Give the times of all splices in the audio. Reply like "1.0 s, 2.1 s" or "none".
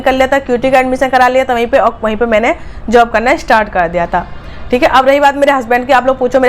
none